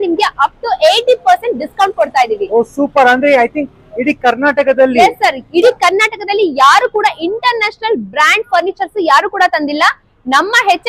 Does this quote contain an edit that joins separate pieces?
no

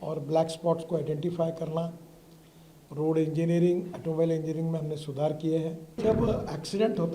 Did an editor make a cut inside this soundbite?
yes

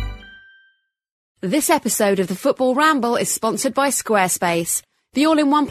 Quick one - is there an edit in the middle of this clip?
yes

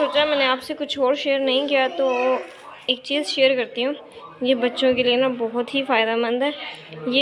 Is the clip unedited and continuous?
yes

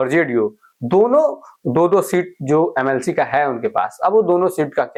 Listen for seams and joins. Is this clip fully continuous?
yes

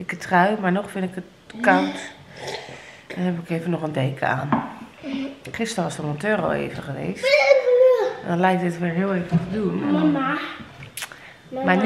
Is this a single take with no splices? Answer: yes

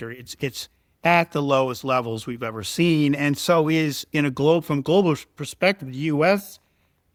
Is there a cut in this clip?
no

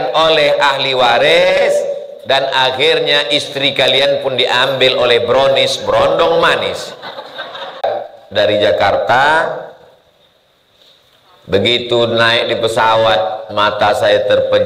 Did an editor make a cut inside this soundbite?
yes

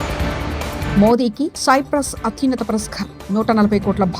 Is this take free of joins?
no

